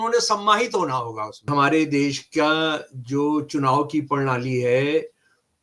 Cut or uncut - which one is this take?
cut